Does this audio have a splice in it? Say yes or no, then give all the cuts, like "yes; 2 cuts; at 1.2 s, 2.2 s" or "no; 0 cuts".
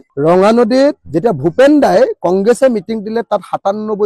no; 0 cuts